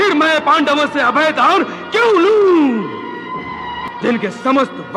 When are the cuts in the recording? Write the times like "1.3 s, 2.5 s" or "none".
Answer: 3.9 s